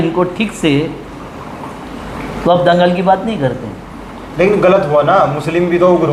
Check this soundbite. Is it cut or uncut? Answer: uncut